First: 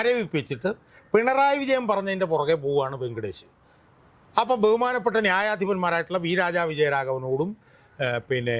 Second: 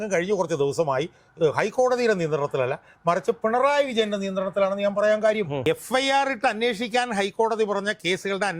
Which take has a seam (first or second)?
second